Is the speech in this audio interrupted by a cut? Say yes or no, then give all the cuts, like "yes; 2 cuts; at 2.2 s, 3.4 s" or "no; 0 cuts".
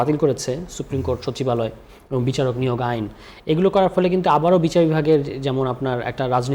no; 0 cuts